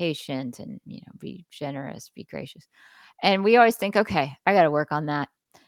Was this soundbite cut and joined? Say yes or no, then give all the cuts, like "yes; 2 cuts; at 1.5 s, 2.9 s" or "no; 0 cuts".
no; 0 cuts